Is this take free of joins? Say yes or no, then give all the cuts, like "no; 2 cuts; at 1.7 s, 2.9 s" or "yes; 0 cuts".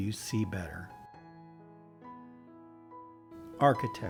yes; 0 cuts